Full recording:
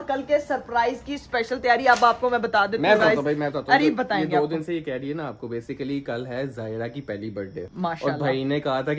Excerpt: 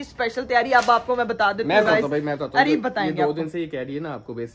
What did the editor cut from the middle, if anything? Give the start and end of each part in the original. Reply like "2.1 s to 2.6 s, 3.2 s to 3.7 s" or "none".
none

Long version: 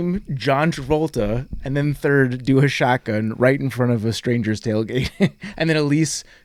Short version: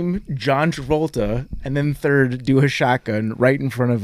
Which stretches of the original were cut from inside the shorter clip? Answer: none

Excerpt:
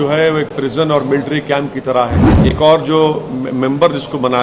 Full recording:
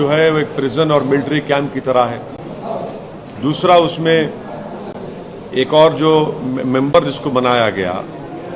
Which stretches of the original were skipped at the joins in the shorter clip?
2.3 s to 5.4 s

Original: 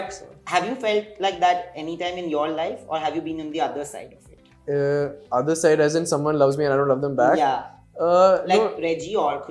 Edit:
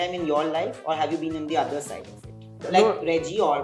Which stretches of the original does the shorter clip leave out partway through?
4.7 s to 8.4 s

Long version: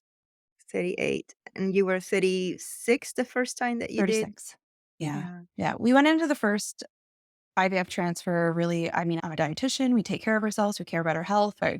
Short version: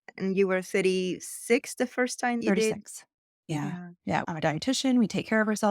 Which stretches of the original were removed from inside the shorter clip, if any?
3.8 s to 3.9 s, 5.8 s to 9.2 s

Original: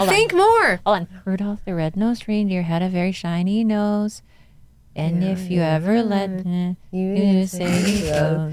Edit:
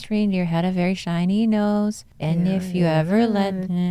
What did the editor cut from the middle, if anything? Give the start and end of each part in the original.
4.3 s to 4.8 s

